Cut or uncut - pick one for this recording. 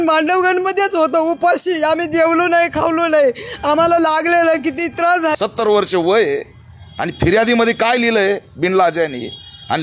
cut